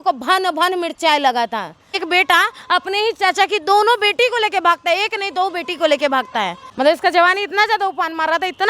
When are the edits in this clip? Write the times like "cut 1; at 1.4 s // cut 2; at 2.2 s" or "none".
cut 1; at 1.9 s // cut 2; at 6.6 s